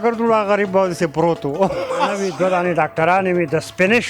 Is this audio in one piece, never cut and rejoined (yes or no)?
no